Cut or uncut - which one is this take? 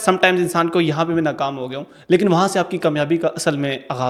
uncut